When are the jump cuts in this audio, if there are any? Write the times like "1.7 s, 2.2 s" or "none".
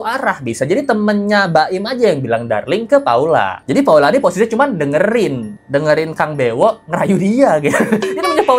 3.6 s

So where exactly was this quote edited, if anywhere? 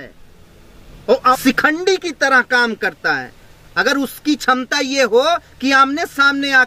1.4 s

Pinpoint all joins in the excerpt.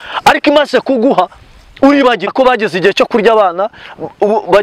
2.3 s

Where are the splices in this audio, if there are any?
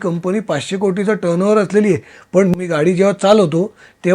2.5 s

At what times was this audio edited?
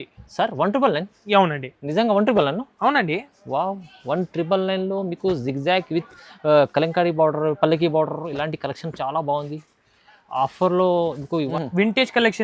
11.5 s

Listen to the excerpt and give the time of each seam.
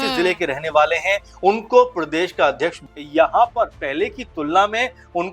2.7 s

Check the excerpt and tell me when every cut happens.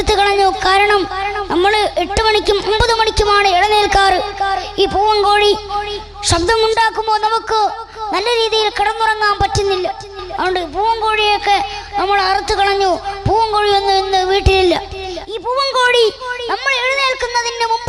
none

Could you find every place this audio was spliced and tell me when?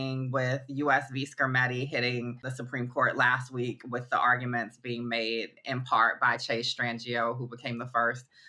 none

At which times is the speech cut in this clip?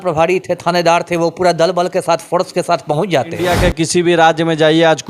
3.5 s

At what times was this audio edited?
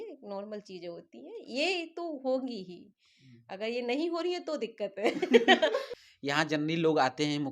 6.0 s

